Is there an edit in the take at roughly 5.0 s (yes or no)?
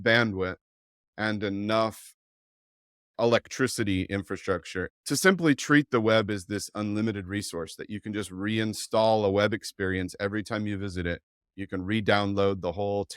yes